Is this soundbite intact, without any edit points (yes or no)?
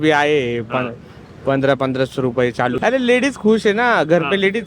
no